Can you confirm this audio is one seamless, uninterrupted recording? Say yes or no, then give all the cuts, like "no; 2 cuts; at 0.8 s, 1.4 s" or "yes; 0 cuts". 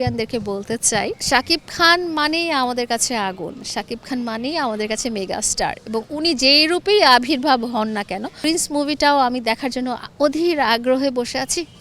no; 2 cuts; at 1.2 s, 8.4 s